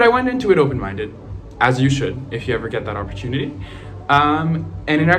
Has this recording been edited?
no; 0 cuts

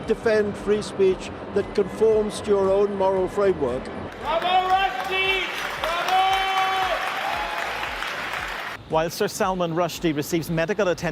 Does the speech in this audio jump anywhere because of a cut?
yes; 2 cuts; at 4.1 s, 8.7 s

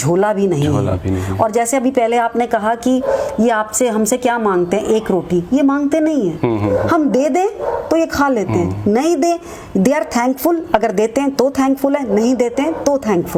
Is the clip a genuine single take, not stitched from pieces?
yes; 0 cuts

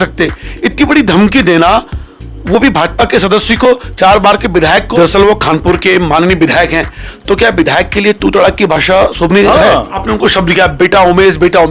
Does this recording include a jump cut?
yes; 2 cuts; at 4.9 s, 10.0 s

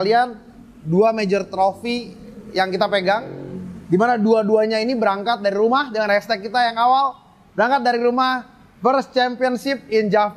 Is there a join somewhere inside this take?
no; 0 cuts

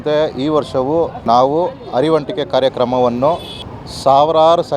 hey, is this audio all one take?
no; 1 cut; at 1.2 s

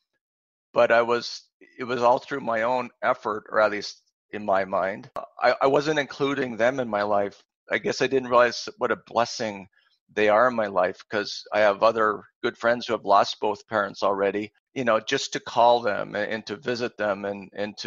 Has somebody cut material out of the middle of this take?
yes; 2 cuts; at 5.3 s, 14.6 s

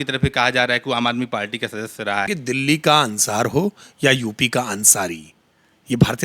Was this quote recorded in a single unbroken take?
no; 1 cut; at 2.3 s

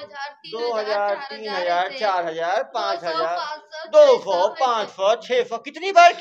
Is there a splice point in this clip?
no; 0 cuts

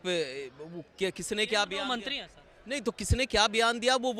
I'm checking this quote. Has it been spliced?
no; 0 cuts

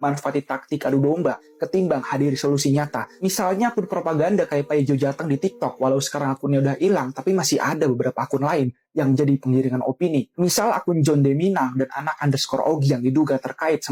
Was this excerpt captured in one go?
yes; 0 cuts

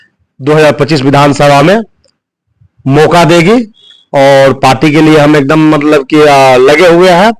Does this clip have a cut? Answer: no; 0 cuts

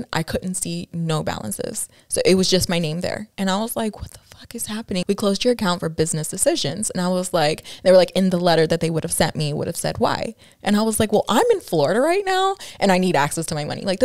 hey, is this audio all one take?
no; 1 cut; at 5.0 s

